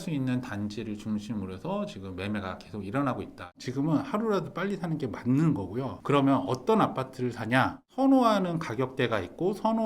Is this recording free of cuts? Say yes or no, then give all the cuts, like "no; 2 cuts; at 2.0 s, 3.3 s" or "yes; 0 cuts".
no; 2 cuts; at 3.6 s, 7.9 s